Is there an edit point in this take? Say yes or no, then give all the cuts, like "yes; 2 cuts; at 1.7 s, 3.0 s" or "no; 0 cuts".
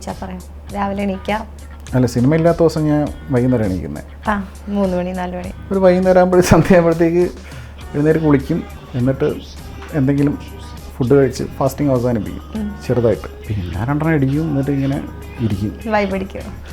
yes; 3 cuts; at 5.5 s, 8.8 s, 13.3 s